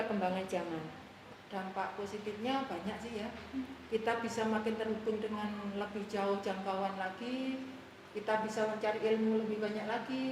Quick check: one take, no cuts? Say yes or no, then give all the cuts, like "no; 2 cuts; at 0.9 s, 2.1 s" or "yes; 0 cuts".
no; 1 cut; at 1.2 s